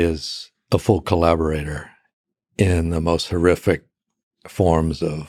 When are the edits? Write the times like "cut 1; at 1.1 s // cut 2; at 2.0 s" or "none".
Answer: none